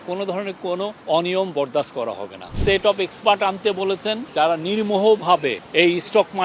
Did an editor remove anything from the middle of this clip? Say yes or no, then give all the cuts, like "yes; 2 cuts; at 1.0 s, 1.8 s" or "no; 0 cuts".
yes; 4 cuts; at 1.0 s, 2.6 s, 4.3 s, 5.6 s